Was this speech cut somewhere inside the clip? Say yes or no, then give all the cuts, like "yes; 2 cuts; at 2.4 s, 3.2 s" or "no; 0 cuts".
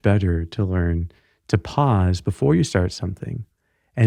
no; 0 cuts